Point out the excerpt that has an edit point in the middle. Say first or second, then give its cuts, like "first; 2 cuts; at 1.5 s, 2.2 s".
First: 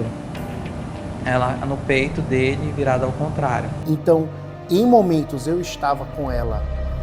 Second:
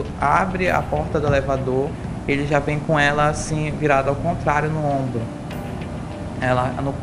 first; 1 cut; at 3.7 s